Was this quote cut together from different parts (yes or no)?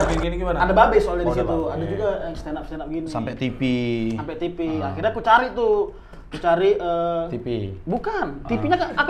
no